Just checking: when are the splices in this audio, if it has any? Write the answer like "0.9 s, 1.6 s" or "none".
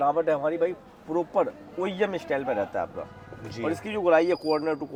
none